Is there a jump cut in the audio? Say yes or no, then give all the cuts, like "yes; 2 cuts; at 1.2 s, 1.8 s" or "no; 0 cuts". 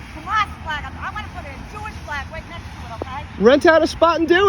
yes; 1 cut; at 3.3 s